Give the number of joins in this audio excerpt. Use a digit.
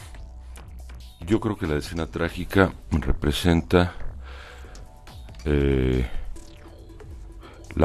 0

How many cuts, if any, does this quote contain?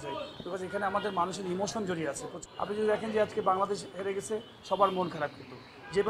1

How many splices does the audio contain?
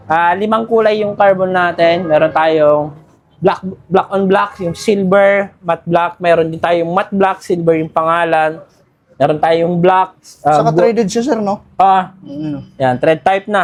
0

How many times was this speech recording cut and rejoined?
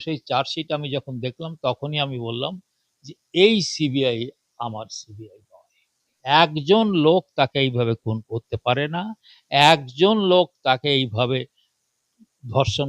1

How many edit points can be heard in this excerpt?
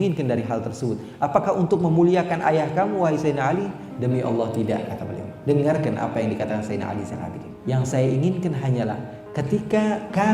1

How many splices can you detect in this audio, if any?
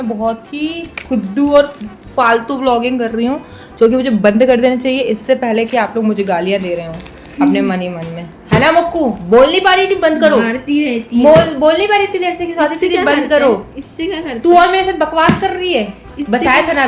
0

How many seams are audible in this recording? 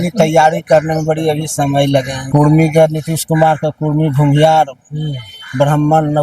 1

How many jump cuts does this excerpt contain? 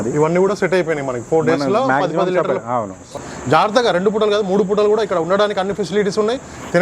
1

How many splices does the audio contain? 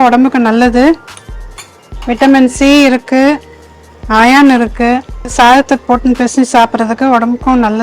1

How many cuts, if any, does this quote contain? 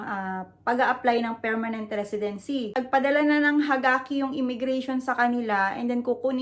1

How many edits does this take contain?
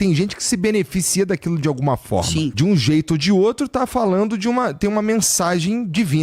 1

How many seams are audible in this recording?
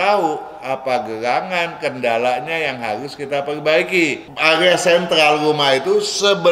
1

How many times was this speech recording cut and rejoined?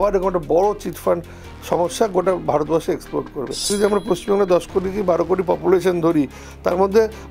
1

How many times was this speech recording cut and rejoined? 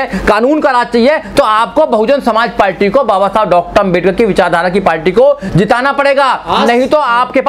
0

